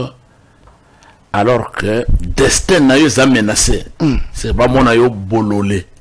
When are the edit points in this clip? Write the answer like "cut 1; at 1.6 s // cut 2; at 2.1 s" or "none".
none